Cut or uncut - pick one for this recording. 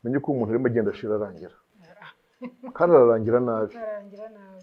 uncut